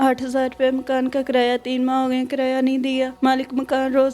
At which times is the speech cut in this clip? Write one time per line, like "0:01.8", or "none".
0:03.1